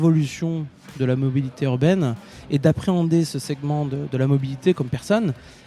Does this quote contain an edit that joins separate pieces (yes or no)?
no